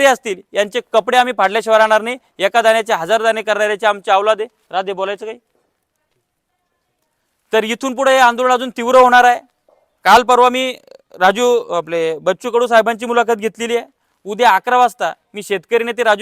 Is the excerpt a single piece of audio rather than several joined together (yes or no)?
yes